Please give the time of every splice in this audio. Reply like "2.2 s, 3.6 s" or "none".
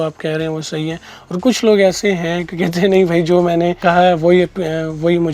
3.8 s